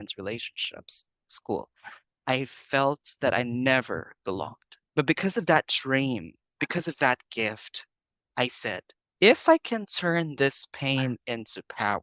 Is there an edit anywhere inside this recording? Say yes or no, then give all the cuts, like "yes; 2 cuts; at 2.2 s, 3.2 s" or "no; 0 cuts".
no; 0 cuts